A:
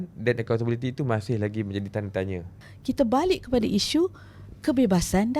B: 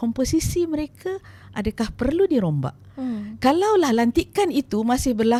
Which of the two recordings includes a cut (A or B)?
A